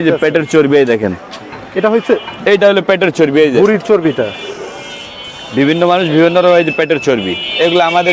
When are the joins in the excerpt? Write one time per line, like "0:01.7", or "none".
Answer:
none